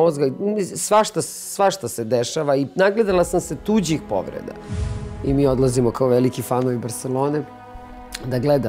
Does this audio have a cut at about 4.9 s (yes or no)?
yes